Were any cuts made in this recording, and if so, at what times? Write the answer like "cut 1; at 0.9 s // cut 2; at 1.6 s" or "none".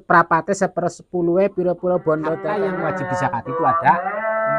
cut 1; at 2.4 s

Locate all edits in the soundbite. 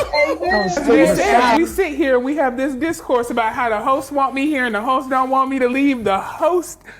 cut 1; at 1.6 s

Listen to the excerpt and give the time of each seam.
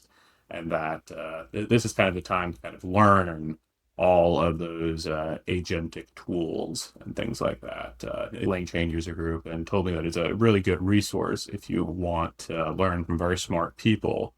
cut 1; at 8.5 s

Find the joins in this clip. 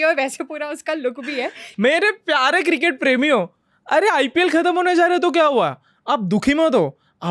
cut 1; at 1.6 s

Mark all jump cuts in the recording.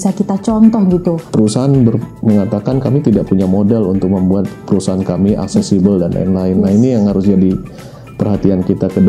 cut 1; at 1.3 s

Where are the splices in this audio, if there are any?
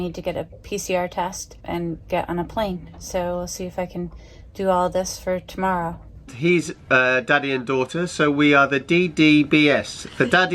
cut 1; at 1.5 s // cut 2; at 6.3 s

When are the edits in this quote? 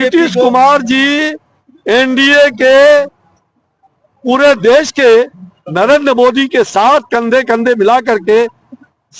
none

